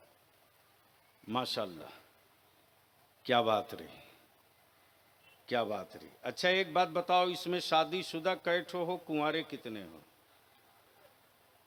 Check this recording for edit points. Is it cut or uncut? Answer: uncut